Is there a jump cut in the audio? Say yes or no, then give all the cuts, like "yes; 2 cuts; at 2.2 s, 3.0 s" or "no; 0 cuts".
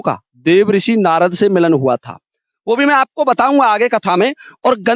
no; 0 cuts